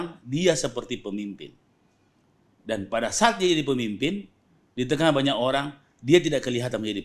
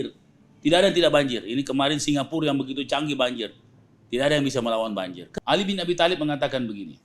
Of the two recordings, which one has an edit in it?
second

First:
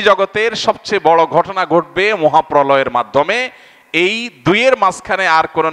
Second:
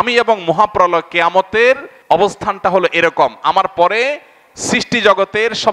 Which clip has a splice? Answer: second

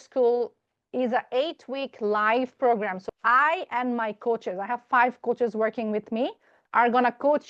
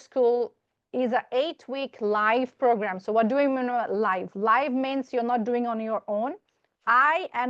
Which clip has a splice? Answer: first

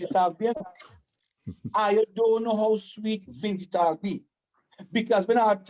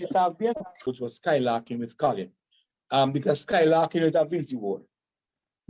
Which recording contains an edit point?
second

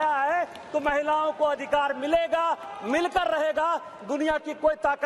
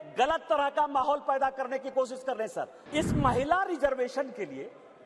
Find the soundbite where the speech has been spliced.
second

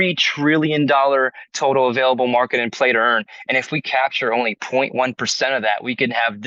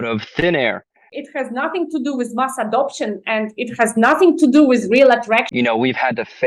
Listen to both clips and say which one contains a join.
second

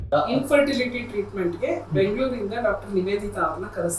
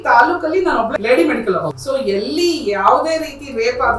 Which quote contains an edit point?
second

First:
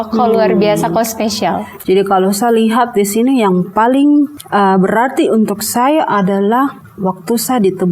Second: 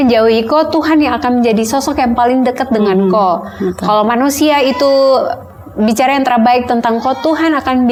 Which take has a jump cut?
first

